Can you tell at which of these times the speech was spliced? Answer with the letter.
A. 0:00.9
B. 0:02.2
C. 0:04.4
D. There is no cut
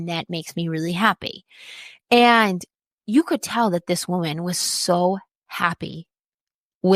D